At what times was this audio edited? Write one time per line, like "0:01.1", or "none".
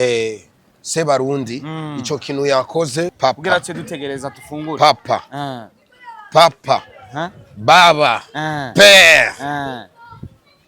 0:03.1